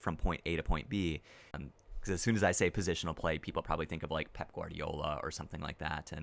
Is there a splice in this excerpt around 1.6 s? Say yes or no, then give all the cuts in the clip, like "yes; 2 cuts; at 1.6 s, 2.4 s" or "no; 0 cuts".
yes; 1 cut; at 1.6 s